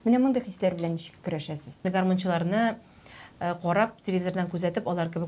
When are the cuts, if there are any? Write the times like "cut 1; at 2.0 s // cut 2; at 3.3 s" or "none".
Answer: cut 1; at 1.8 s